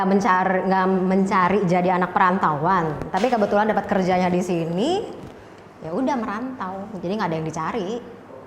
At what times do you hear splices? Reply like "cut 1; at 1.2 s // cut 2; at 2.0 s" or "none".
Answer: none